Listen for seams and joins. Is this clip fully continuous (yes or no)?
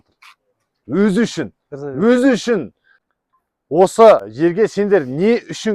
no